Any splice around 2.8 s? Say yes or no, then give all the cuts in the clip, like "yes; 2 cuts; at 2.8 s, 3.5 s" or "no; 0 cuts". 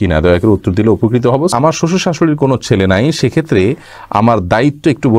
no; 1 cut; at 1.5 s